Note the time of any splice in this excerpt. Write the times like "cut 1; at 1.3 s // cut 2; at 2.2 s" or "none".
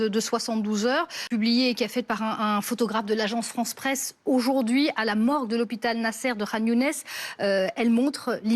cut 1; at 1.2 s